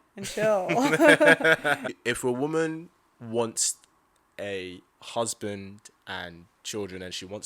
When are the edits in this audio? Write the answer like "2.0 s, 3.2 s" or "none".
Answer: 1.8 s